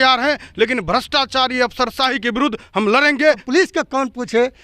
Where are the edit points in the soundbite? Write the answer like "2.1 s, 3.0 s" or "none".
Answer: 3.4 s